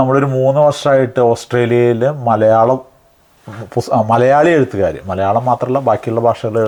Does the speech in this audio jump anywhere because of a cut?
no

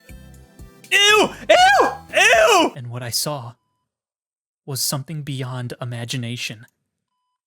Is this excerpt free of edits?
no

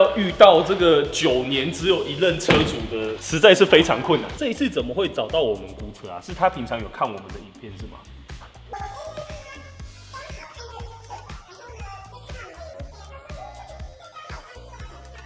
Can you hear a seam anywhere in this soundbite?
no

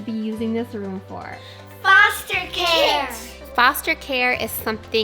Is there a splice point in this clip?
yes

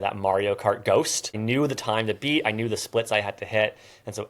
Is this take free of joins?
no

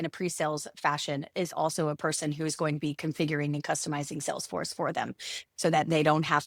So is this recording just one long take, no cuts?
yes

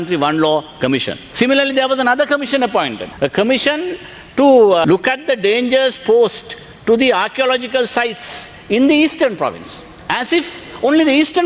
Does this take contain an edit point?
yes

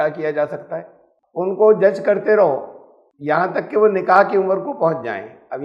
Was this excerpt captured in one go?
no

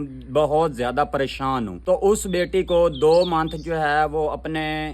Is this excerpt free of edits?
no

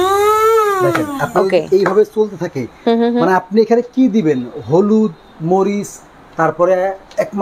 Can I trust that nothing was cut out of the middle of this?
yes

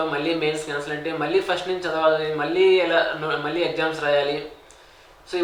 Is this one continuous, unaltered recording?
yes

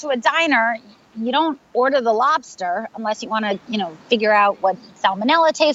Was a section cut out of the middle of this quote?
no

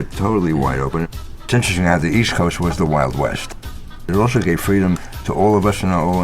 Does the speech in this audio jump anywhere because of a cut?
yes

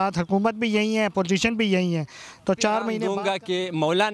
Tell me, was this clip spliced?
yes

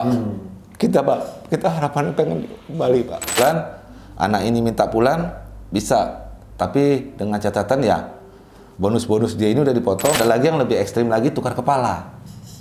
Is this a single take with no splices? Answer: no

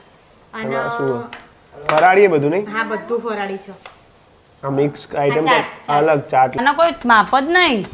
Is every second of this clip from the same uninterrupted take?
no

